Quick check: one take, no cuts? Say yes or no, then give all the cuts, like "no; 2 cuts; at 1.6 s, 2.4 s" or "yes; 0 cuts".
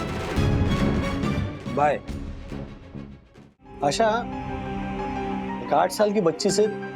no; 1 cut; at 3.7 s